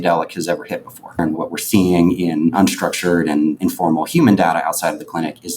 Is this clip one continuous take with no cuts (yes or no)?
no